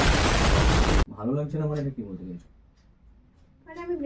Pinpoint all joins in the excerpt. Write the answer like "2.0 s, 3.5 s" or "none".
1.0 s